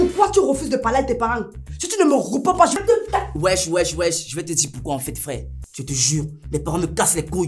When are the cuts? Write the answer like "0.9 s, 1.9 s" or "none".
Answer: 5.6 s